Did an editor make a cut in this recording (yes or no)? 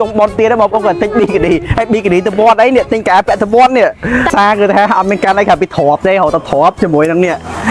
yes